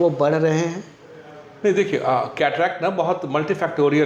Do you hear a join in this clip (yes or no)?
no